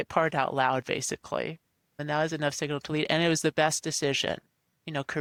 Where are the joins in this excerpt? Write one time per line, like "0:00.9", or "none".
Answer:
none